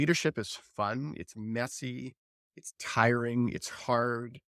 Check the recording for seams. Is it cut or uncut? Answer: uncut